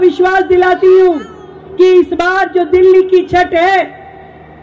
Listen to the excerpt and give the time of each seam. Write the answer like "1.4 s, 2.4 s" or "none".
none